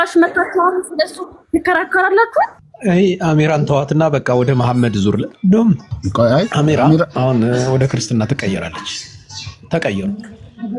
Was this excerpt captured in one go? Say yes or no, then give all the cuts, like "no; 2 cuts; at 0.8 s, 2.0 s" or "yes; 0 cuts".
no; 1 cut; at 2.6 s